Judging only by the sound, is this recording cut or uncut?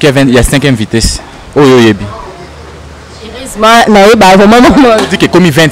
uncut